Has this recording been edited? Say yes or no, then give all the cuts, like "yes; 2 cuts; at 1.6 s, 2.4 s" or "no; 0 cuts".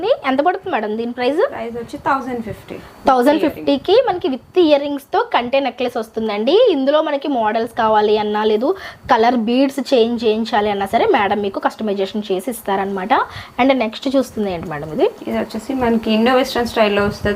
no; 0 cuts